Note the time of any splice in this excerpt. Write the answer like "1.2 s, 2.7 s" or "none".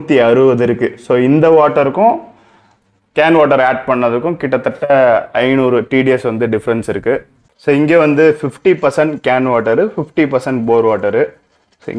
none